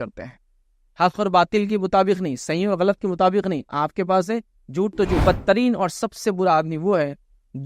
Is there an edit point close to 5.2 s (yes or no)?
yes